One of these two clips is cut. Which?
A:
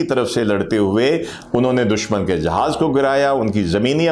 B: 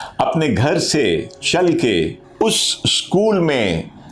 B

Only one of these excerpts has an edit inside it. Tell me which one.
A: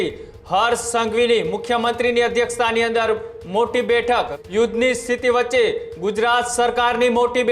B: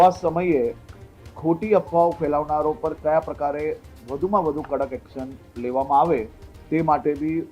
A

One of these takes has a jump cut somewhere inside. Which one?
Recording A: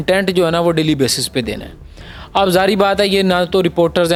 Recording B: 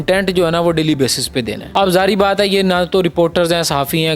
B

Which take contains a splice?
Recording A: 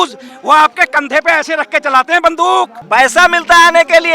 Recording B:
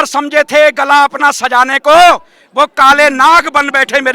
A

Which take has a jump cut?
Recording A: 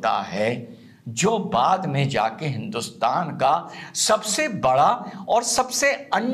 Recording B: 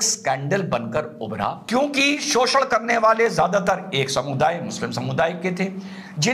B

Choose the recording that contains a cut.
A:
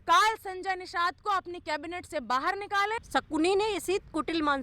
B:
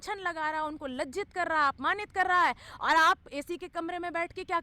A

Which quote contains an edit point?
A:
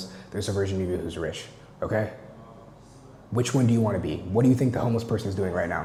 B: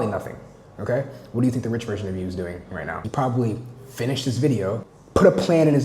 B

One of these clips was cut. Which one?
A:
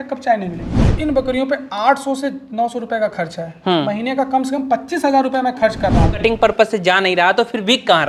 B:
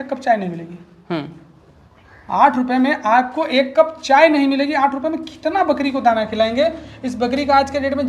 A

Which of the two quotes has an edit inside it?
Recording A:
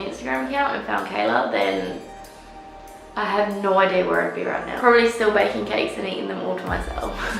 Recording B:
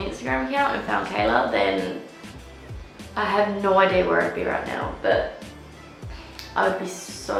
A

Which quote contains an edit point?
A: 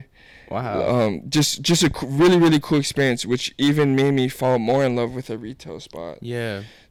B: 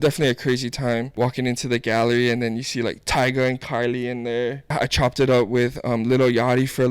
B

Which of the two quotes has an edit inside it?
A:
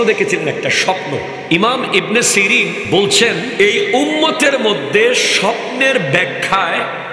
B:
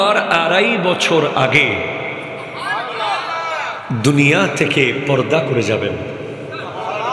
A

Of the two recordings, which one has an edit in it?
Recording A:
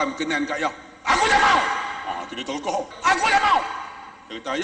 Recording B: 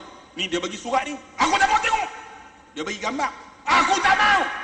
A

